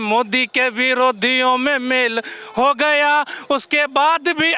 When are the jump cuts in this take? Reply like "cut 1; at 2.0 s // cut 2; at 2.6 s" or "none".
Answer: none